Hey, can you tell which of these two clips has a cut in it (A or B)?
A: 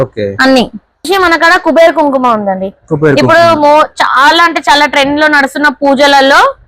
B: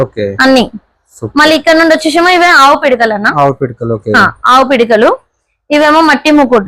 A